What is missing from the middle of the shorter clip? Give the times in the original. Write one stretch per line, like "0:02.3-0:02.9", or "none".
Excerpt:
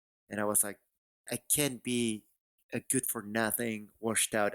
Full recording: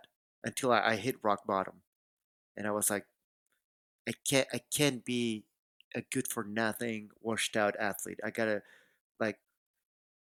0:03.5-0:04.5

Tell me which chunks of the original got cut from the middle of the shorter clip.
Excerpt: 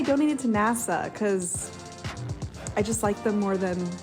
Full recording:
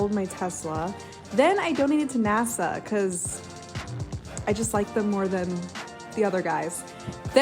none

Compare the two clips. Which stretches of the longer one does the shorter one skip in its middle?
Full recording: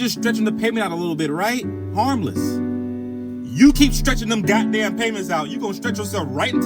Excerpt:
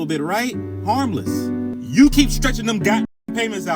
0:02.9-0:03.4

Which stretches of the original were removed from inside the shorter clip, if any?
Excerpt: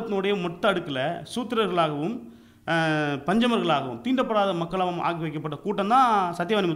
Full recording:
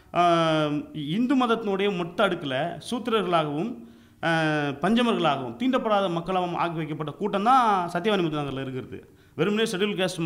none

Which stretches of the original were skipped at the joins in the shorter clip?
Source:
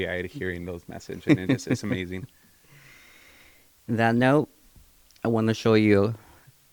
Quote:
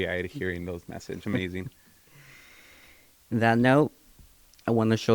0:01.2-0:01.8

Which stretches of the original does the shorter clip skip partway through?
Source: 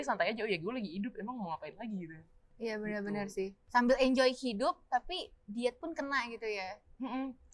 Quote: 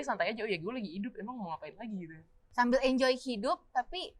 0:02.4-0:03.6

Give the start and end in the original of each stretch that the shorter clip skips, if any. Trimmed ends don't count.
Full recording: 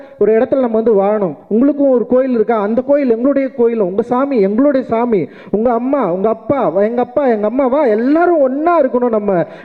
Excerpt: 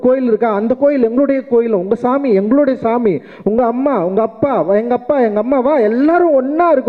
none

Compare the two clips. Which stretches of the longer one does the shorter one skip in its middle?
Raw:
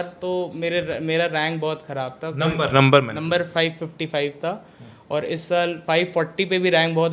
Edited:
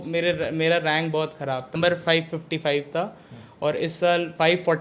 0:02.2-0:03.2

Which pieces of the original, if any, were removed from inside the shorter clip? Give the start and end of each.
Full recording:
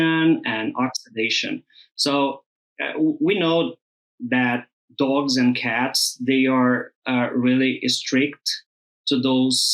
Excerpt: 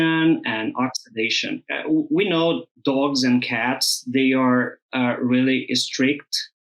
0:01.7-0:02.8
0:03.8-0:04.8

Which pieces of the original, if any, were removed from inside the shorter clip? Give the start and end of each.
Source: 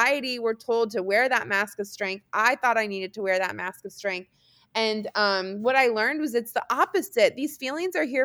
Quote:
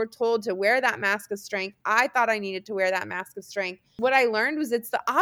0:04.4-0:05.5

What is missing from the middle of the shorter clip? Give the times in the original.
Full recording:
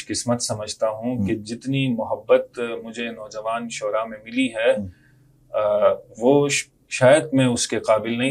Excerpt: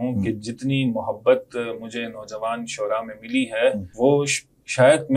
0:04.9-0:06.1

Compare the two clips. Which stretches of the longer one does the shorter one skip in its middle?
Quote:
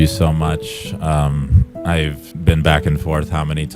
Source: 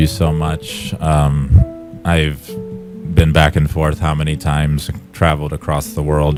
0:02.0-0:02.7

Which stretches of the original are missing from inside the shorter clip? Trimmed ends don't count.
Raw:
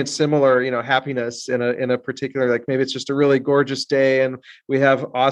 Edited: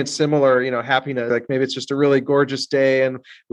0:01.3-0:02.5

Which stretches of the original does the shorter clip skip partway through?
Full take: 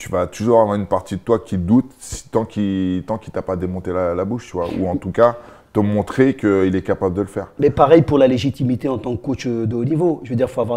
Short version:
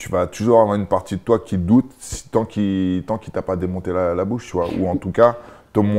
none

